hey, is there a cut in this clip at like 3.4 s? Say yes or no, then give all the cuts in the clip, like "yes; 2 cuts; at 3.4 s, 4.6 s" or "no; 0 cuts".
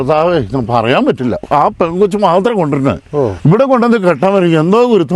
yes; 2 cuts; at 1.4 s, 3.4 s